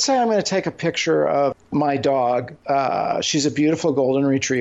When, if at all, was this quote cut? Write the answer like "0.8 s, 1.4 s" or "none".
1.6 s, 2.5 s